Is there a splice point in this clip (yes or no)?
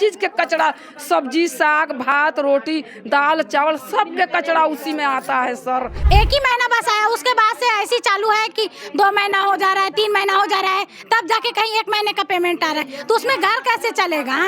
yes